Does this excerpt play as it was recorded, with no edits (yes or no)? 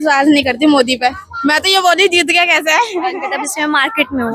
no